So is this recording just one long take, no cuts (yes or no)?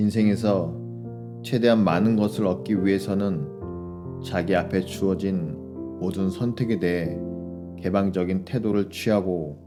yes